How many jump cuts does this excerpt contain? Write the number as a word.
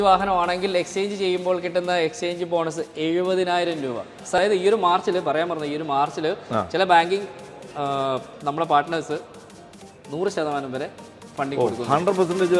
one